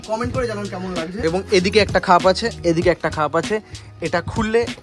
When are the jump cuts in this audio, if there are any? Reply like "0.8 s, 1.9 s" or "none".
1.1 s